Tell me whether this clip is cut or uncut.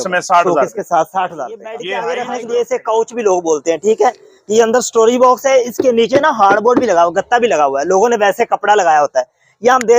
cut